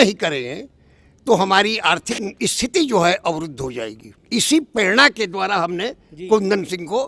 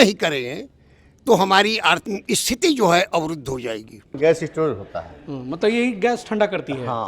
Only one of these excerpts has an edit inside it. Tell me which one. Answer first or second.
second